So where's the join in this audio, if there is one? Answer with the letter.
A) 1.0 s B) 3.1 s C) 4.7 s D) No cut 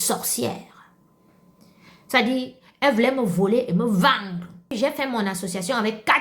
C